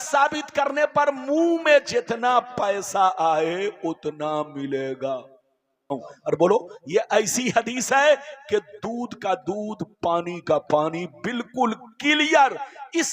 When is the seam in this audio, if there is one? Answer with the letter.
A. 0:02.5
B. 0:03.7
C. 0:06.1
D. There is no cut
C